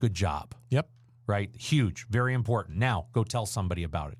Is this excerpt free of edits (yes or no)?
yes